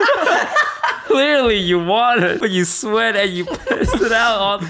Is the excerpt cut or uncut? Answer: cut